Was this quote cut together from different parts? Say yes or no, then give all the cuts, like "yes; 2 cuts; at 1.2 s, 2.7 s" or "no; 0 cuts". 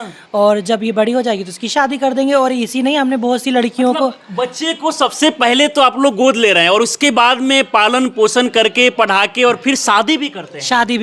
no; 0 cuts